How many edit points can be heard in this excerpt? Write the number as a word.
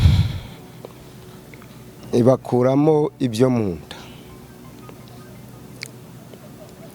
one